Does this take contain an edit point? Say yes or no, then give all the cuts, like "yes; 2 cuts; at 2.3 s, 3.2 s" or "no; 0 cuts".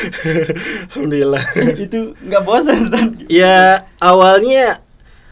no; 0 cuts